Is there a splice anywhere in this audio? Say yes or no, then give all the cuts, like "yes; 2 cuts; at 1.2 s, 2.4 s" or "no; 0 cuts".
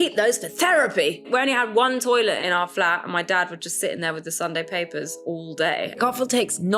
yes; 3 cuts; at 1.2 s, 2.4 s, 6.0 s